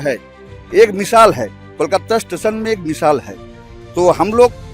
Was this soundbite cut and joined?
no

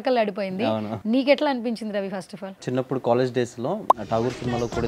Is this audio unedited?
no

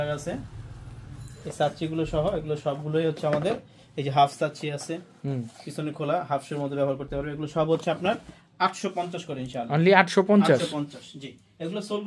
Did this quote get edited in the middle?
no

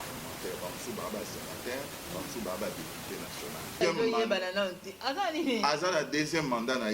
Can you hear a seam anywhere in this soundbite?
yes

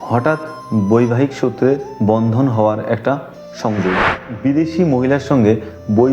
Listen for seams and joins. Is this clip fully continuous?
no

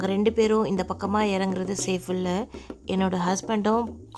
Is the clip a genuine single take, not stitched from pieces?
yes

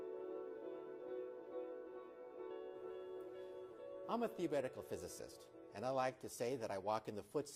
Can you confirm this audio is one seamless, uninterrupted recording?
yes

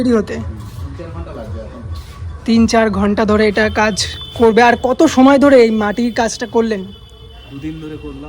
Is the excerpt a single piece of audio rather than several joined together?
yes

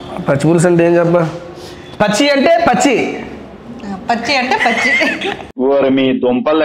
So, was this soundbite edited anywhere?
no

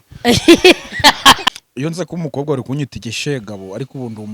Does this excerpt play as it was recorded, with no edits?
no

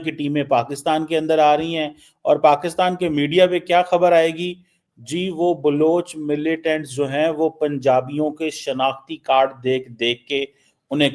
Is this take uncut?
yes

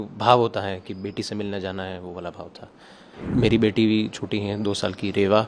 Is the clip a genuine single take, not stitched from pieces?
no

